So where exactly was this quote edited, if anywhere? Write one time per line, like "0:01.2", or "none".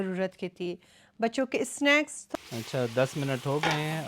0:02.2